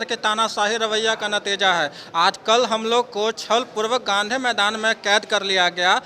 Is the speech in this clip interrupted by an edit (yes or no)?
no